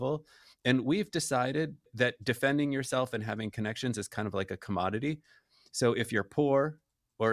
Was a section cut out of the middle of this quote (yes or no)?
no